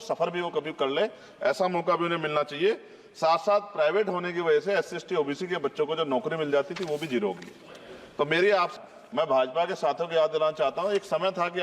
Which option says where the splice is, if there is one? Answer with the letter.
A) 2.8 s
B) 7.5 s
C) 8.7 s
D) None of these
C